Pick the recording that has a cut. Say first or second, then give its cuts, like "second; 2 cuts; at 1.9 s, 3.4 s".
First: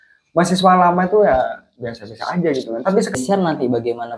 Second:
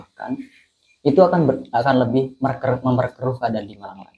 first; 1 cut; at 3.1 s